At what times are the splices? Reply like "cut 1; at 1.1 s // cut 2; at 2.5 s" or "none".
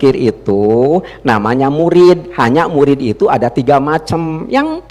none

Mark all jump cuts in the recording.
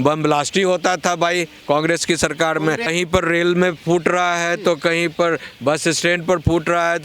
cut 1; at 2.9 s

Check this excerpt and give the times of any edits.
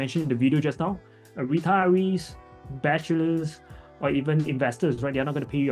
none

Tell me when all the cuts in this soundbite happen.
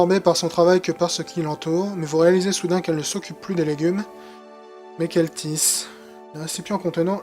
cut 1; at 4.8 s

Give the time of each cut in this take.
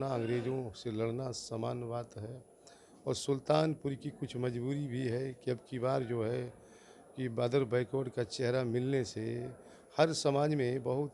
none

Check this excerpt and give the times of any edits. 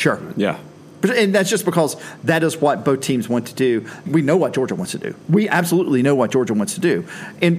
cut 1; at 4.0 s

